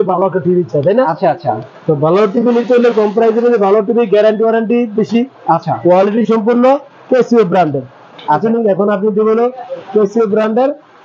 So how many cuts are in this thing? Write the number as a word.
one